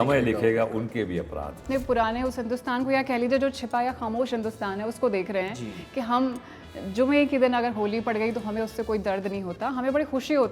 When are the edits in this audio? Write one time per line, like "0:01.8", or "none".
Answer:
0:01.6